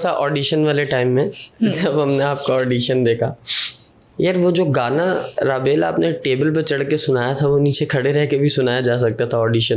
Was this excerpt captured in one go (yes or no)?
yes